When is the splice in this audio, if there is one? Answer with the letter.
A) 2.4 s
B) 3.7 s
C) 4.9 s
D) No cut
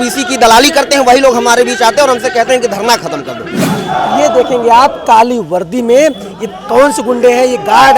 B